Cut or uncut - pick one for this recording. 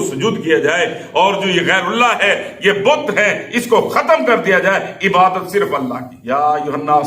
cut